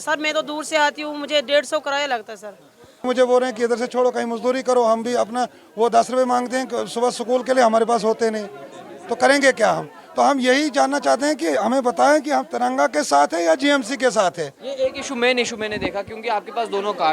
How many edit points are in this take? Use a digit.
1